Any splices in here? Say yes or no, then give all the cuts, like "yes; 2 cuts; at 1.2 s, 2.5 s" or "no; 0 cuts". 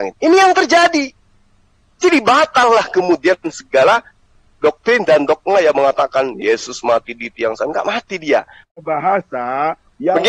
yes; 1 cut; at 8.6 s